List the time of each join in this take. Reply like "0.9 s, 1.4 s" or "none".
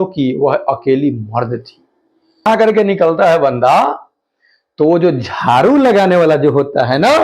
2.4 s